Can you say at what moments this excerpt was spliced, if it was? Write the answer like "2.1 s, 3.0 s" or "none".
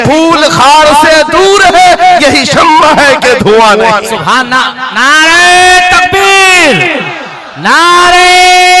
none